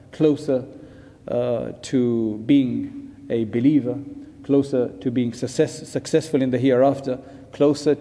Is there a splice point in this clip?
no; 0 cuts

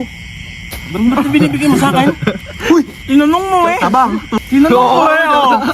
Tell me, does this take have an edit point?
yes; 1 cut; at 4.3 s

